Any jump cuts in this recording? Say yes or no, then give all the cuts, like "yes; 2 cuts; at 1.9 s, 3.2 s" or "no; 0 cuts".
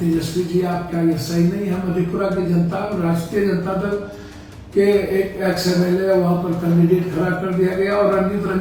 no; 0 cuts